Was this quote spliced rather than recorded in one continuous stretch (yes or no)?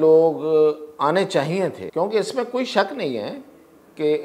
yes